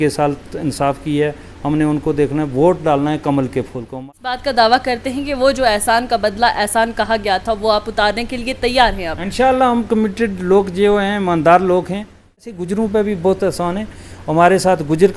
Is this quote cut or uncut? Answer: cut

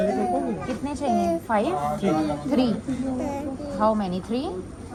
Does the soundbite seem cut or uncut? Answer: uncut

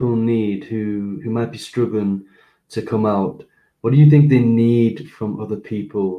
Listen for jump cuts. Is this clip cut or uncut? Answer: uncut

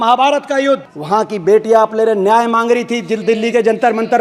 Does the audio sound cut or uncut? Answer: cut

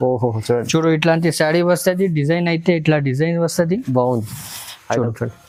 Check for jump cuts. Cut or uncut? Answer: uncut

